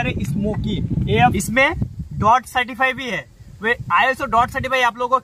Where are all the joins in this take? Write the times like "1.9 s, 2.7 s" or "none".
1.3 s